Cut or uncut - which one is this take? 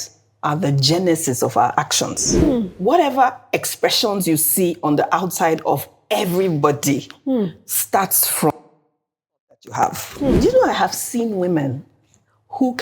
cut